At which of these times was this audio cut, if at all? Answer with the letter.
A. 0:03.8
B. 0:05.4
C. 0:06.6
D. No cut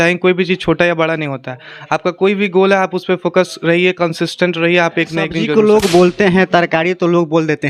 B